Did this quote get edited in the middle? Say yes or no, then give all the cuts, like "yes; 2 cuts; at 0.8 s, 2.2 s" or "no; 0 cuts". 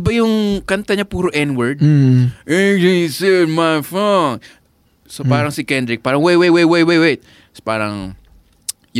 no; 0 cuts